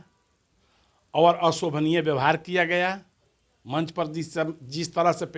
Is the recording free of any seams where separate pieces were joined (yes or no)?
yes